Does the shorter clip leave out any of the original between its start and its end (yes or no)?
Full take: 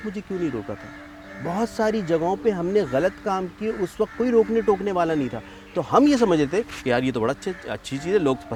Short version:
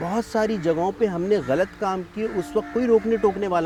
no